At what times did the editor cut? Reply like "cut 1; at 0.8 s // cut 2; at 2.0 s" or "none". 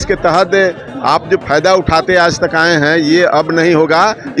none